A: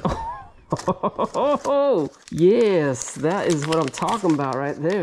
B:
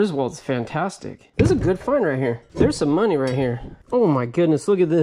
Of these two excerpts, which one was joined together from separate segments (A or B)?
B